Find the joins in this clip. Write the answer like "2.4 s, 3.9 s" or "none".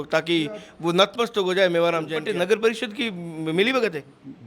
2.2 s